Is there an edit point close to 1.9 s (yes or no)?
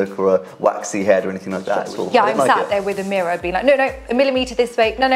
yes